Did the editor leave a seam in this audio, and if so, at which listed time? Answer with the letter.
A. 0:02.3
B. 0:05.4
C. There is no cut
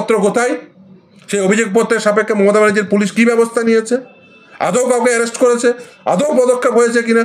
C